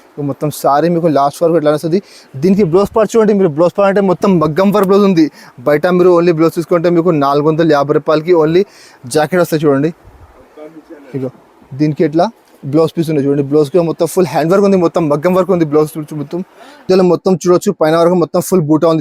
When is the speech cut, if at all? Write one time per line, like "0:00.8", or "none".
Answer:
0:16.8

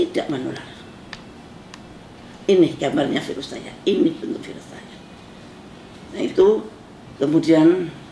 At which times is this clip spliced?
none

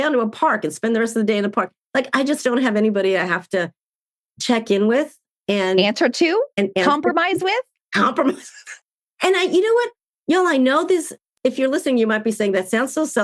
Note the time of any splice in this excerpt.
none

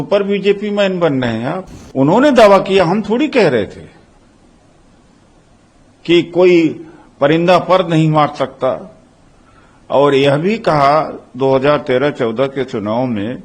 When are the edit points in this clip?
0:01.7

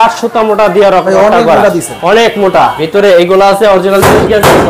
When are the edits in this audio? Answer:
0:02.8

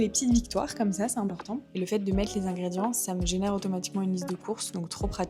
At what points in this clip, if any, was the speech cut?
0:01.7

